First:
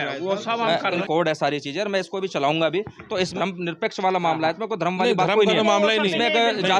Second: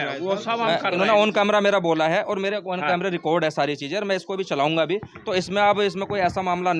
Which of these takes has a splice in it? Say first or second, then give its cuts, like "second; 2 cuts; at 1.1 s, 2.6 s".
first; 2 cuts; at 1.0 s, 3.3 s